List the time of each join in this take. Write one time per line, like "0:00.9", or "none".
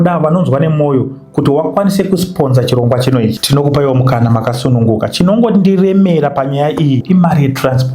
0:03.4
0:07.0

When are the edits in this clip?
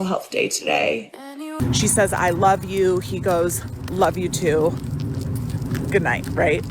0:01.6

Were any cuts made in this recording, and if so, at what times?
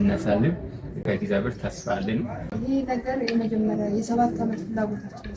0:01.0
0:02.5

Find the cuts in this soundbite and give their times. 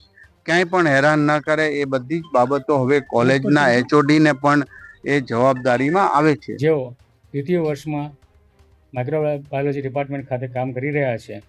0:06.5

